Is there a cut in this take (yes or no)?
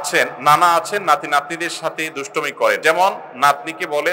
yes